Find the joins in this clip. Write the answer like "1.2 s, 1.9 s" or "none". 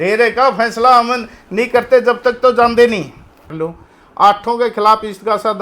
3.5 s